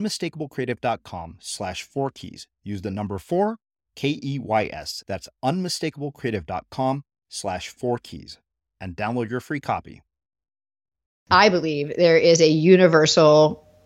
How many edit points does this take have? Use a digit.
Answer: 1